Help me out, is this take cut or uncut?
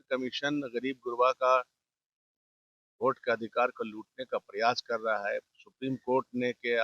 uncut